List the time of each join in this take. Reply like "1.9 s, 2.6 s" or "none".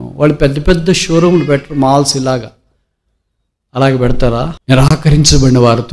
4.6 s